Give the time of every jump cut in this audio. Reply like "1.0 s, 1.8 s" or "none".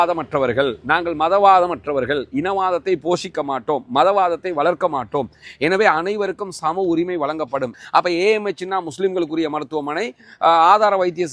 7.8 s